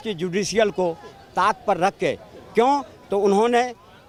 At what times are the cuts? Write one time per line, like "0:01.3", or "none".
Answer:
none